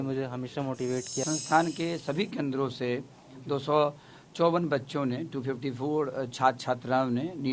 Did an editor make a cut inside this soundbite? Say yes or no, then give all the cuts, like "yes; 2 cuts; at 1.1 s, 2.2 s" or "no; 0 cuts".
yes; 1 cut; at 1.2 s